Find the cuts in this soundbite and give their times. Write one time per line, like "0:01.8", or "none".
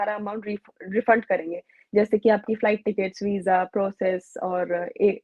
none